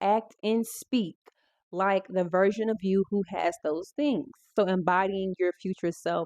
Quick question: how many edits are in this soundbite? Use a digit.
1